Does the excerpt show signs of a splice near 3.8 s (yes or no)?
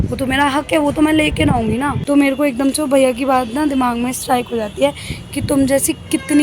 no